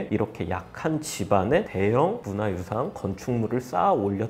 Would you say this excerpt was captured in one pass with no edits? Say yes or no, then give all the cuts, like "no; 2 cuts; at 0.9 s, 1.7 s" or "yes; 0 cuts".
yes; 0 cuts